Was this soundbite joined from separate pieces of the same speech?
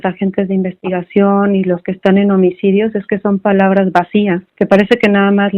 yes; 1 cut; at 4.5 s

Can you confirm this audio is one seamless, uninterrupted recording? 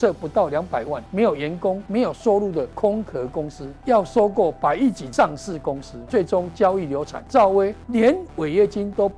no; 8 cuts; at 1.0 s, 1.8 s, 2.7 s, 3.7 s, 5.0 s, 5.9 s, 7.2 s, 7.8 s

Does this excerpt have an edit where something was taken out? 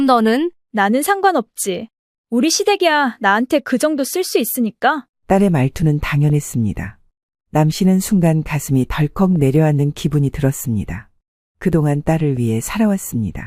no; 0 cuts

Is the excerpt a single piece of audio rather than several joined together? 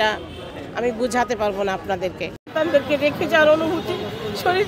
no; 1 cut; at 2.3 s

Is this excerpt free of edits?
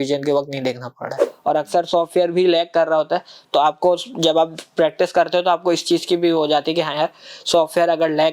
no; 1 cut; at 1.3 s

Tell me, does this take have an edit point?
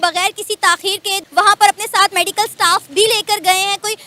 no; 0 cuts

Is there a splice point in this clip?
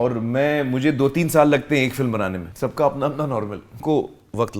yes; 2 cuts; at 2.5 s, 3.8 s

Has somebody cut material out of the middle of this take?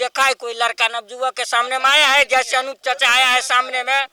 no; 0 cuts

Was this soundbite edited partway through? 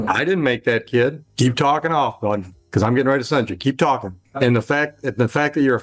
yes; 2 cuts; at 1.2 s, 4.2 s

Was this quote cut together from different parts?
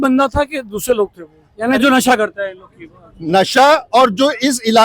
yes; 1 cut; at 1.5 s

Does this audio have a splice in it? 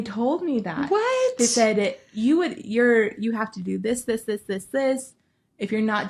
no; 0 cuts

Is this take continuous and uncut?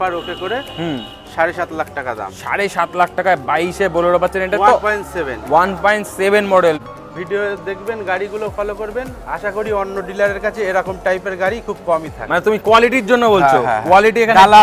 no; 1 cut; at 6.8 s

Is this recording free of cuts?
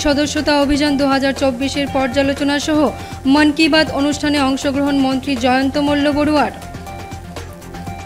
yes; 0 cuts

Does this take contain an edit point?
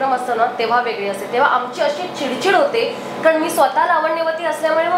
no; 0 cuts

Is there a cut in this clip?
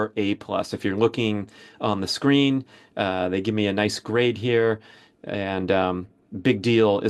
no; 0 cuts

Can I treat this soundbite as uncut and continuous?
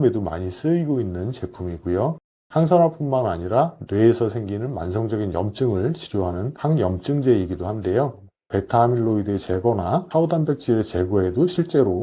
no; 1 cut; at 8.4 s

